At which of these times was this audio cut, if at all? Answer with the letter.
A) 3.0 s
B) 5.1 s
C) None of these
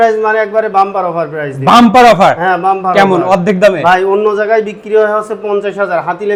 C